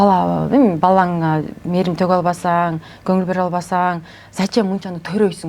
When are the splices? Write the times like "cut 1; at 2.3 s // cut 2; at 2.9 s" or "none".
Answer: none

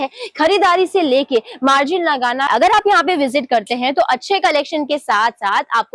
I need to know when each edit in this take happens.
cut 1; at 2.5 s

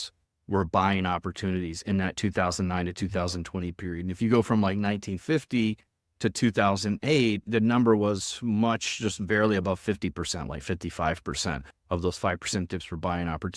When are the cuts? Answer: none

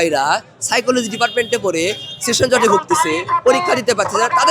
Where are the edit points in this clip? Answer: none

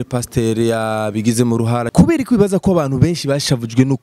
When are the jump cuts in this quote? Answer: cut 1; at 1.9 s

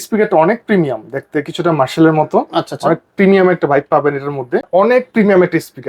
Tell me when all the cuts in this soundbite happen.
cut 1; at 4.7 s

